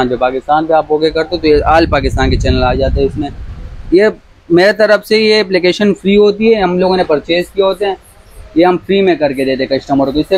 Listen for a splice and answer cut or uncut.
uncut